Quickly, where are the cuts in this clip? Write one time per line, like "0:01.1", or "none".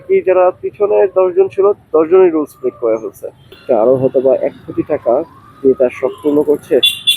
0:03.5

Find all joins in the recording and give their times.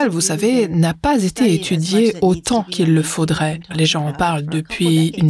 0:02.2
0:03.7

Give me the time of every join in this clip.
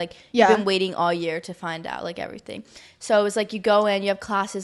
none

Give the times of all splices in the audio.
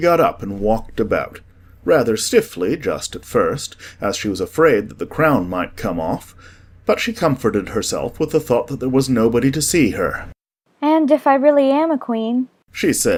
none

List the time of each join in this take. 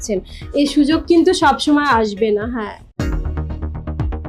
0:02.9

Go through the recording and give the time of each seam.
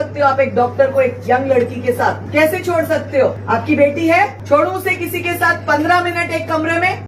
0:02.2
0:03.4
0:04.4

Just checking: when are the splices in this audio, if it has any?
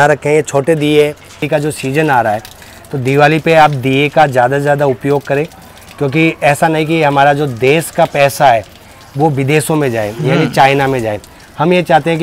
0:01.4

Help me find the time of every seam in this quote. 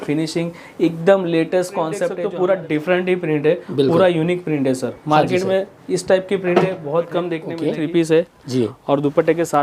0:02.1
0:07.5

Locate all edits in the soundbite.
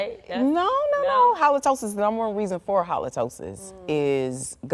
none

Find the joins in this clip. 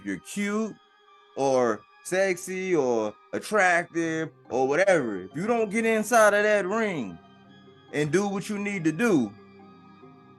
0:09.3

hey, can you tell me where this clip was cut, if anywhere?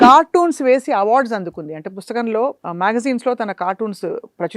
0:02.6

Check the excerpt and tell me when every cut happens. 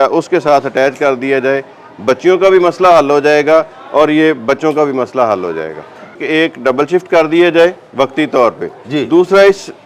0:06.2

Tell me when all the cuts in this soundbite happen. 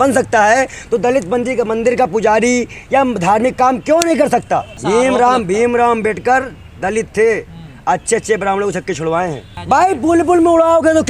0:04.7
0:09.5

